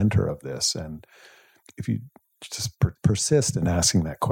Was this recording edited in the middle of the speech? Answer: yes; 2 cuts; at 1.6 s, 3.0 s

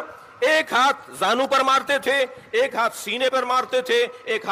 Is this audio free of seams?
yes; 0 cuts

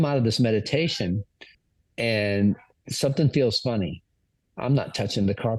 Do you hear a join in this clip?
no; 0 cuts

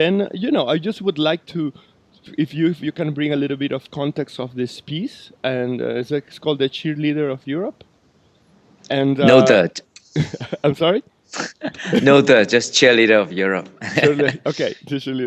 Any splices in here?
no; 0 cuts

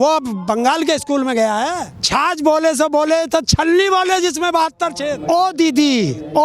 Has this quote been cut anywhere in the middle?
yes; 2 cuts; at 1.9 s, 5.1 s

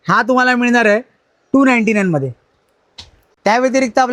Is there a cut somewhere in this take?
no; 0 cuts

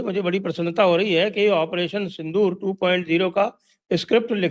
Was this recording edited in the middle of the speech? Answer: no; 0 cuts

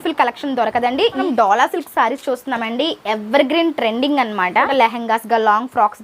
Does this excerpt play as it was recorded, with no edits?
no; 2 cuts; at 1.2 s, 4.7 s

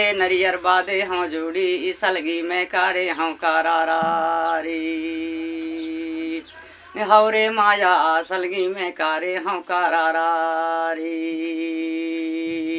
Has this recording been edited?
no; 0 cuts

